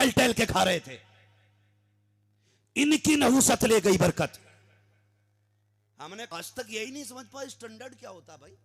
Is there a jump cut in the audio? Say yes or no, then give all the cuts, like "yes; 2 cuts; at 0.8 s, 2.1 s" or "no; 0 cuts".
yes; 1 cut; at 6.3 s